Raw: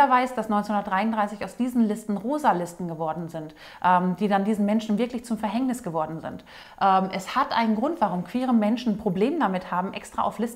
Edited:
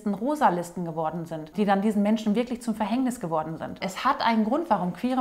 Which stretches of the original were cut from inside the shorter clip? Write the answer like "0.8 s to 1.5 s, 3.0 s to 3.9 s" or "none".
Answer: 3.6 s to 4.2 s, 6.5 s to 7.2 s